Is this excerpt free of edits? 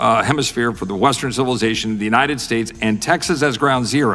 yes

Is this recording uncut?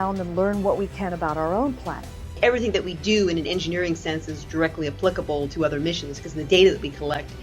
no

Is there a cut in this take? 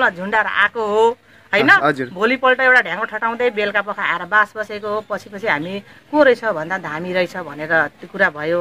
no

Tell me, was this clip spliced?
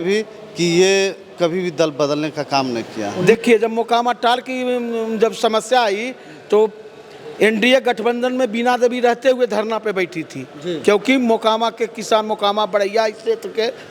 yes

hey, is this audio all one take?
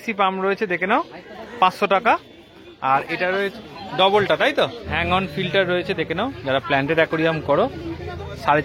no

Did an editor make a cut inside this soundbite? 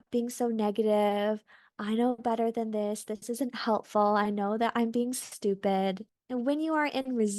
yes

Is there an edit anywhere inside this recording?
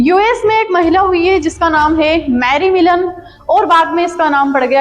no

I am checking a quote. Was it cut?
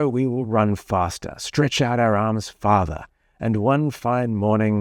no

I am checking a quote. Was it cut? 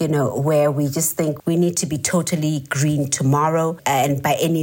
yes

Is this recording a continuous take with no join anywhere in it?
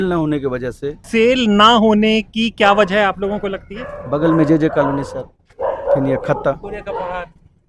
no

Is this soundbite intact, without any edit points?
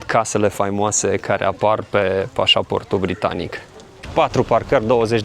no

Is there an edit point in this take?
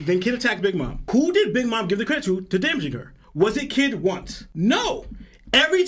yes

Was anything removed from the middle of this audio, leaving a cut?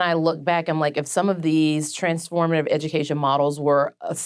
no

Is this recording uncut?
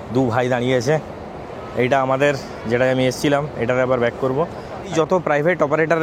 no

